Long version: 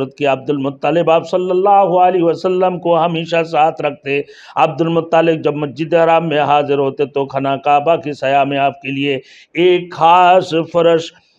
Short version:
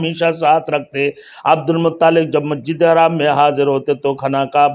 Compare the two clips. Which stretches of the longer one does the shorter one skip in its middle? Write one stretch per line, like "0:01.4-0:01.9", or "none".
none